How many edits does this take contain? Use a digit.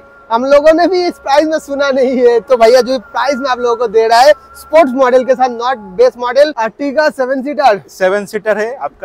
1